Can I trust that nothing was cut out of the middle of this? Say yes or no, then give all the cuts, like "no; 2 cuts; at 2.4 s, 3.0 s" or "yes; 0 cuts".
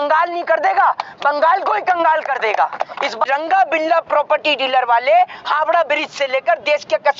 no; 1 cut; at 3.2 s